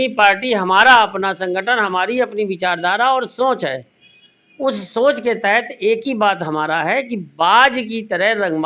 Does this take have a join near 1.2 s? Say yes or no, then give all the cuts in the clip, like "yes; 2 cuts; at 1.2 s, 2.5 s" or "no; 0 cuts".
no; 0 cuts